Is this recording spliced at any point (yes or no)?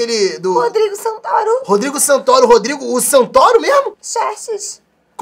yes